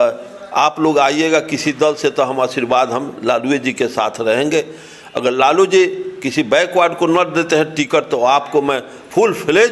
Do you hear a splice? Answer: no; 0 cuts

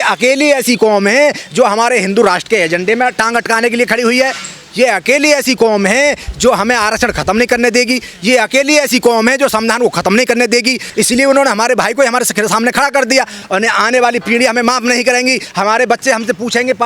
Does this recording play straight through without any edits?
no; 2 cuts; at 10.9 s, 13.4 s

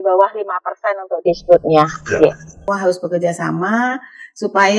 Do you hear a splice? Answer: yes; 1 cut; at 2.6 s

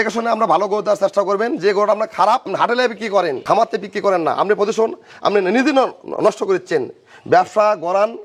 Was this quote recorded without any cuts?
yes; 0 cuts

